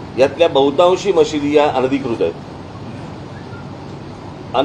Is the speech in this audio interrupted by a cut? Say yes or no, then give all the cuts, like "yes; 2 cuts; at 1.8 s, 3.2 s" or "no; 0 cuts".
no; 0 cuts